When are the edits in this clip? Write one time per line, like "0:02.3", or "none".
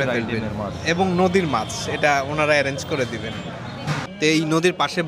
0:04.1